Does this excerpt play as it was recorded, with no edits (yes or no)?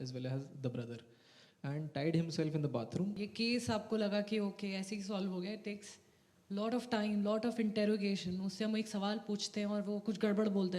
no